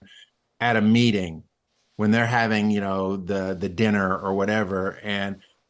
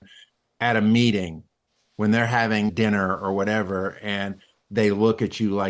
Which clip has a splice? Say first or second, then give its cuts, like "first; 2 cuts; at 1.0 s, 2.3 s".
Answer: second; 1 cut; at 2.7 s